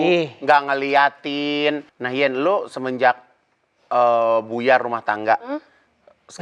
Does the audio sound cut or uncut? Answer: cut